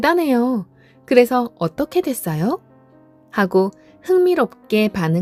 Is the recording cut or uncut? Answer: uncut